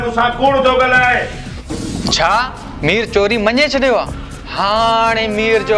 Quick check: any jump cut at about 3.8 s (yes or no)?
no